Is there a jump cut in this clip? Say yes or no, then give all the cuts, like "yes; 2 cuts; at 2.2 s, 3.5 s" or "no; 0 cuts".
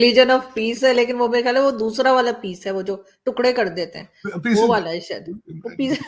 no; 0 cuts